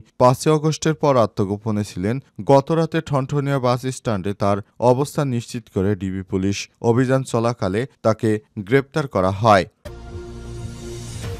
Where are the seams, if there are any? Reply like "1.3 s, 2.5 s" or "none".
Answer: 9.9 s